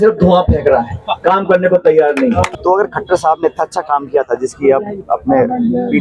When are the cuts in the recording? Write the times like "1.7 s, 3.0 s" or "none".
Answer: 2.5 s